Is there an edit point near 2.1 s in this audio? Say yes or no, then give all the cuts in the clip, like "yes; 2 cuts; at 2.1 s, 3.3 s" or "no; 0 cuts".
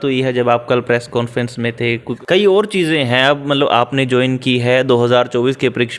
yes; 1 cut; at 2.1 s